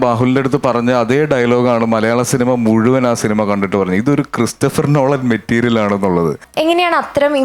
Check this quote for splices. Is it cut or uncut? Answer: cut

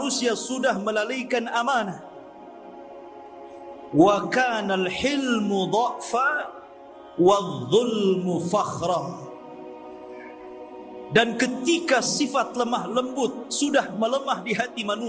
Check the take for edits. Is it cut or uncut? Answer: cut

